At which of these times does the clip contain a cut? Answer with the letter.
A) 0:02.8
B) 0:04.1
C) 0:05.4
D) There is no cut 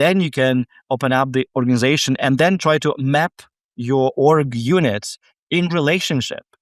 D